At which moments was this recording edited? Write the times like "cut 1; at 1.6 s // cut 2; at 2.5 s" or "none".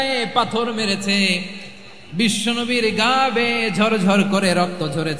none